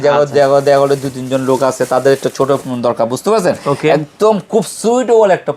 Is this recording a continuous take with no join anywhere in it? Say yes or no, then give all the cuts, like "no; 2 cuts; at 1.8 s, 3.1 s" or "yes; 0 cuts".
yes; 0 cuts